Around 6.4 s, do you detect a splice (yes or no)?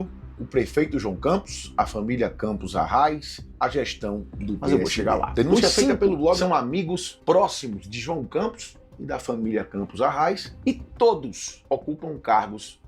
yes